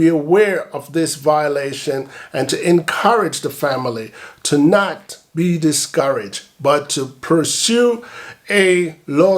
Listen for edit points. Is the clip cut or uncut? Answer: uncut